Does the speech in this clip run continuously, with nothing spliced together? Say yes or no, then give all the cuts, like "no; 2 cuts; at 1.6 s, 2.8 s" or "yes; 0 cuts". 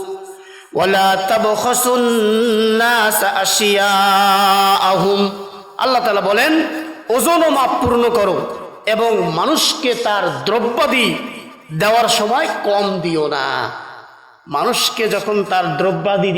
yes; 0 cuts